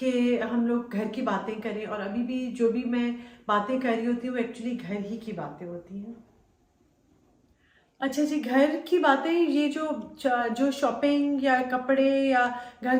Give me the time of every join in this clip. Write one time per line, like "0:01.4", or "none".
none

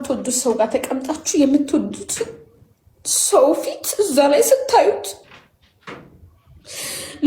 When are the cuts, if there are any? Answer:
none

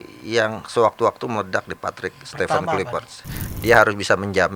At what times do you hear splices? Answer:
0:03.5

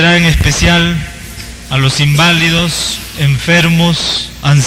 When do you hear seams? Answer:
none

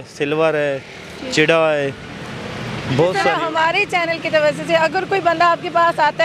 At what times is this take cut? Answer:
0:03.3

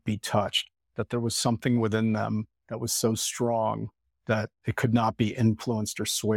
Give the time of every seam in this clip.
0:04.6

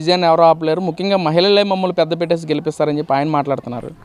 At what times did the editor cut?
none

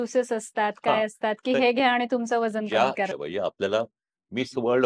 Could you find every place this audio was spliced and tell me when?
0:03.1

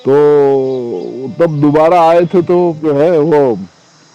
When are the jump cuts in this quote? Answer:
0:02.8

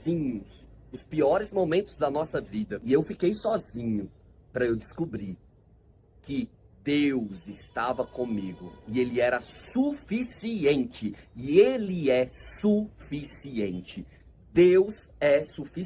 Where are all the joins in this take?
0:02.8

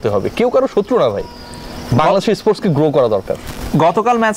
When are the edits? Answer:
none

